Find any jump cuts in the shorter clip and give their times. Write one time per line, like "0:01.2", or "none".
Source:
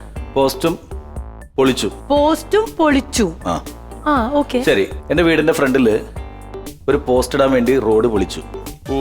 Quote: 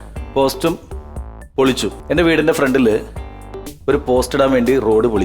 0:02.0